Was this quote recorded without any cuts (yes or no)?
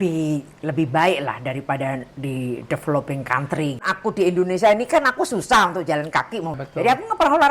no